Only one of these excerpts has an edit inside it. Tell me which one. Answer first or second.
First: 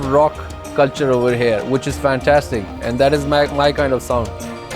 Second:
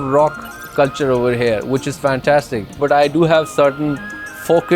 second